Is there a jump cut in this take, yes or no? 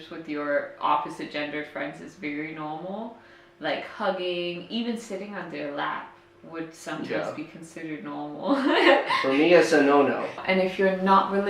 yes